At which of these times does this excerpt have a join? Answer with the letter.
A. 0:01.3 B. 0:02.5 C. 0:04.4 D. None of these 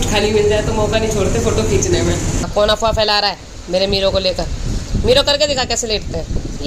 B